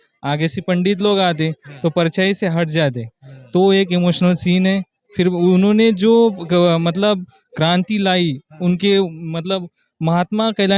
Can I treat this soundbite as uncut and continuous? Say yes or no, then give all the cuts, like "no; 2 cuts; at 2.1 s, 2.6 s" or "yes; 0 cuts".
yes; 0 cuts